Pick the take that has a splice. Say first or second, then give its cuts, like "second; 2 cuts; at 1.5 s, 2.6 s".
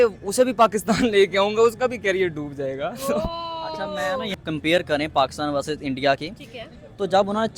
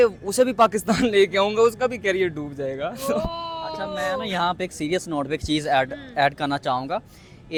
first; 1 cut; at 4.3 s